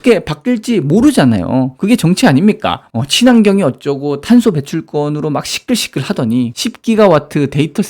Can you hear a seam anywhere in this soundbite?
no; 0 cuts

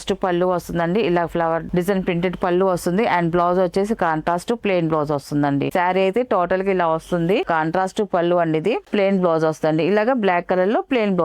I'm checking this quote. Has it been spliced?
yes; 4 cuts; at 1.7 s, 5.7 s, 7.5 s, 8.8 s

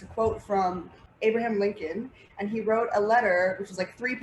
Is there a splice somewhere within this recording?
yes; 1 cut; at 1.0 s

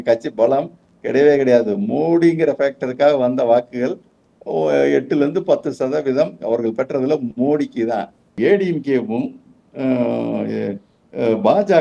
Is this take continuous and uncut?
no; 1 cut; at 8.2 s

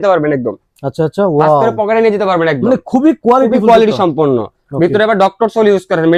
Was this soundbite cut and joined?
no; 0 cuts

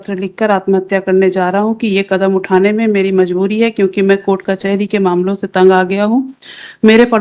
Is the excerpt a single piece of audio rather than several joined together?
yes; 0 cuts

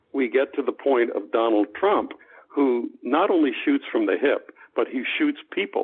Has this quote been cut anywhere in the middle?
no; 0 cuts

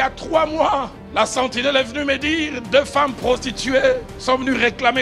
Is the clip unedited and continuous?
no; 2 cuts; at 1.0 s, 4.1 s

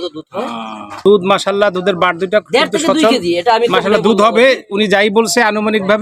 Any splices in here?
no; 0 cuts

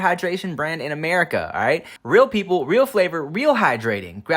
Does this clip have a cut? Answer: yes; 1 cut; at 1.9 s

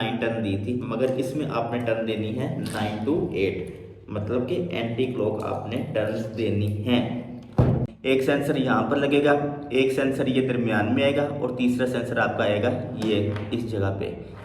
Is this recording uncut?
no; 1 cut; at 7.9 s

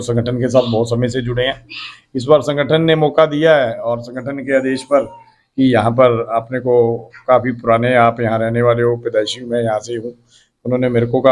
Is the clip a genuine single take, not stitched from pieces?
yes; 0 cuts

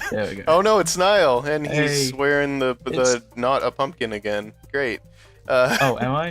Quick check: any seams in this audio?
yes; 1 cut; at 3.3 s

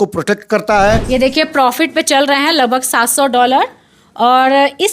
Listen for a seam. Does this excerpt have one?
yes; 1 cut; at 1.0 s

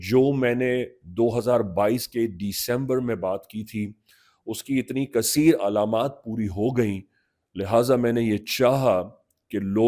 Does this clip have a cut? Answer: no; 0 cuts

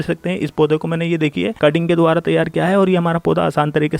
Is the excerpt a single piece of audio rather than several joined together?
yes; 0 cuts

